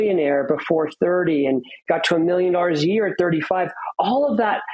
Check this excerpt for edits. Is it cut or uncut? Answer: uncut